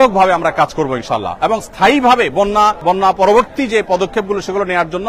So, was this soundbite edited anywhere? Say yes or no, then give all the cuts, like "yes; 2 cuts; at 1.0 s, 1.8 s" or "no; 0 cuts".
no; 0 cuts